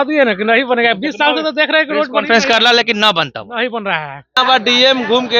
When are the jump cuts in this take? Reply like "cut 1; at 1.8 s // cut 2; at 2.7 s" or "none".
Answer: cut 1; at 4.3 s